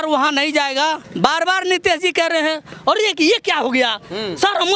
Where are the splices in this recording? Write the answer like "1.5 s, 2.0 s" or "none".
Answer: 1.0 s